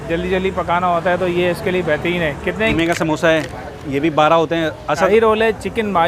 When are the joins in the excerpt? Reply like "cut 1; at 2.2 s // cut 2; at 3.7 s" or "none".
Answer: cut 1; at 2.7 s // cut 2; at 5.1 s